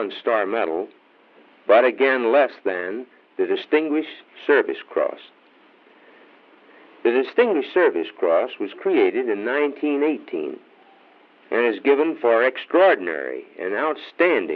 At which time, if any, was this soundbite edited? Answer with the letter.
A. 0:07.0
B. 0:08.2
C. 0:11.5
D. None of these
C